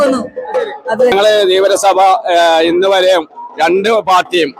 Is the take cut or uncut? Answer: cut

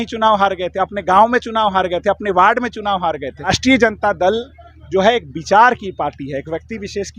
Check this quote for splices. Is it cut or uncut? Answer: cut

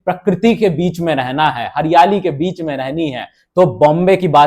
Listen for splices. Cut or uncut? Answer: cut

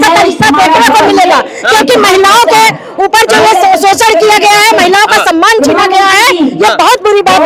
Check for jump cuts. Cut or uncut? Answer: uncut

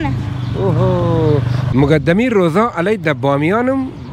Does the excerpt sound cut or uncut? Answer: cut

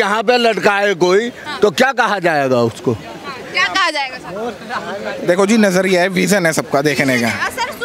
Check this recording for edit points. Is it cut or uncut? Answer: uncut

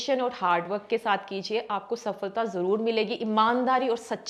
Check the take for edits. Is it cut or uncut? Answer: uncut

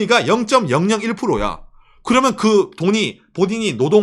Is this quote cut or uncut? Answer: uncut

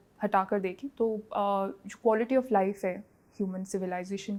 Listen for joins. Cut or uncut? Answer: uncut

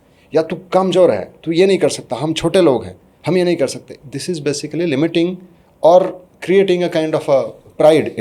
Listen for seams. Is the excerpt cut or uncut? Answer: cut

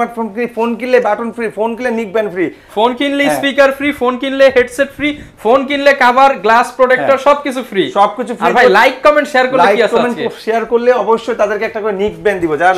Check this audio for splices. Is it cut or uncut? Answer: uncut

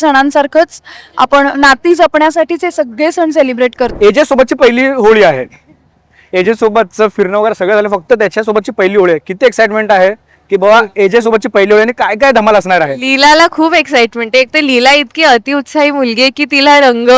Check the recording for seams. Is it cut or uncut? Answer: cut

